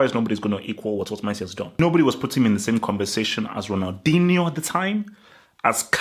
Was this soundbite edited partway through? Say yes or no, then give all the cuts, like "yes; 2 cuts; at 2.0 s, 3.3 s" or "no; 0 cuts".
yes; 1 cut; at 1.8 s